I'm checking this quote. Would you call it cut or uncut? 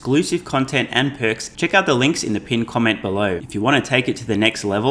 cut